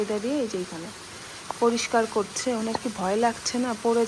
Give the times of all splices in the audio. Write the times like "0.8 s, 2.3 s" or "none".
none